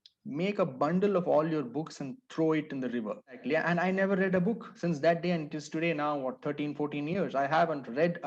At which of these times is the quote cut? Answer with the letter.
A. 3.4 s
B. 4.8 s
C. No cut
A